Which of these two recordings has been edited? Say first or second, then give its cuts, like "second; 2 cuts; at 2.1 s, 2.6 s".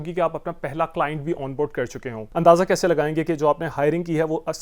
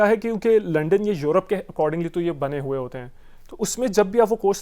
first; 1 cut; at 2.2 s